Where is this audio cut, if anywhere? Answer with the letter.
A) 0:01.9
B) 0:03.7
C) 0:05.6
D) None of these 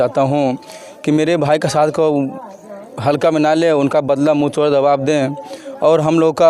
D